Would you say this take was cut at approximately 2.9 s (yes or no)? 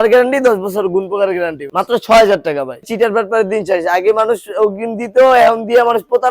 yes